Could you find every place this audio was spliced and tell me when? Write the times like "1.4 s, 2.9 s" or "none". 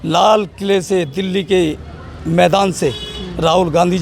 none